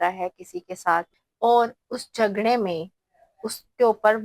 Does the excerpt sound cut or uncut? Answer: cut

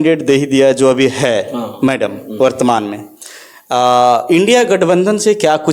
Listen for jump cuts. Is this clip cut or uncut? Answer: uncut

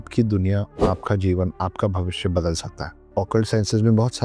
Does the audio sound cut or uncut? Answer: cut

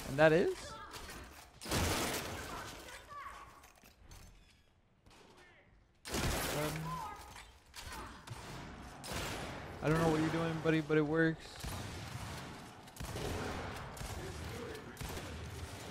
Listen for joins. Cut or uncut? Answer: uncut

